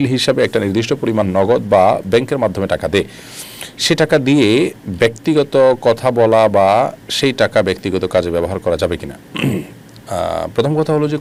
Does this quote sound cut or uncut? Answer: uncut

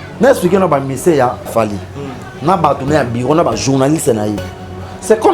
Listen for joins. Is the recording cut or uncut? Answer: cut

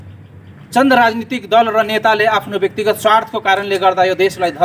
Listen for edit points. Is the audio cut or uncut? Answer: uncut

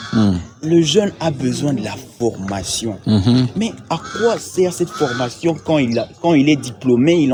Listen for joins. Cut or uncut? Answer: uncut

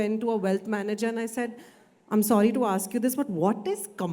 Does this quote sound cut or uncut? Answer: uncut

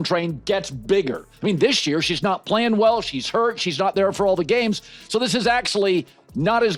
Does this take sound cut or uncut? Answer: uncut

